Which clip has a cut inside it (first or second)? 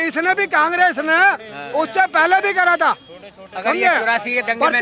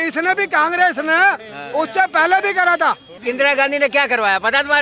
second